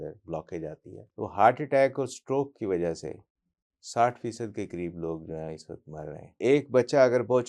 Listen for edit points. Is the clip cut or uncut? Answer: cut